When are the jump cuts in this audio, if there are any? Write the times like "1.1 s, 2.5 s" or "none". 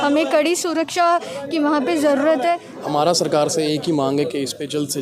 2.7 s